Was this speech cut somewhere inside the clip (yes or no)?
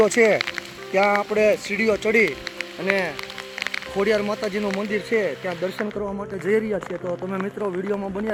no